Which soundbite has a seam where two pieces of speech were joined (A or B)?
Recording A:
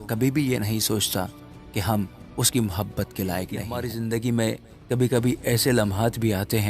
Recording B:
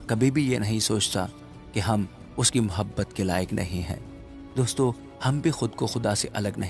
A